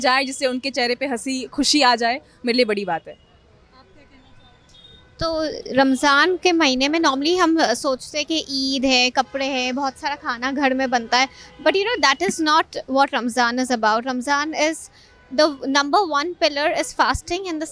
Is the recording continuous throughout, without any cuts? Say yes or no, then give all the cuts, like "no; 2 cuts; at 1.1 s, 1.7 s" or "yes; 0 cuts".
yes; 0 cuts